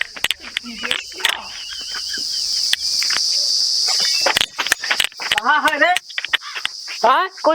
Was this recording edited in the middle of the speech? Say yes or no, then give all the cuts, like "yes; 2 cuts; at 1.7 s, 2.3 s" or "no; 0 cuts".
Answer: yes; 1 cut; at 3.2 s